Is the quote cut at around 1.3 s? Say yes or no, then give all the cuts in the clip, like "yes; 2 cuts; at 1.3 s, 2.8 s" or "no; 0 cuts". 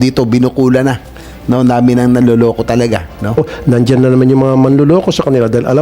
no; 1 cut; at 3.5 s